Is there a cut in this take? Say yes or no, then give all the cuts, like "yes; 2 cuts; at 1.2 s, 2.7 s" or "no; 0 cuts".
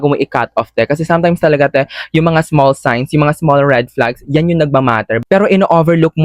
yes; 1 cut; at 5.2 s